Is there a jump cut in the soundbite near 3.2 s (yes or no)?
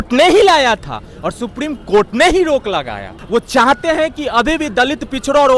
yes